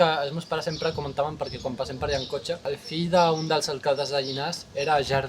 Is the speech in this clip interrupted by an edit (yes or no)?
yes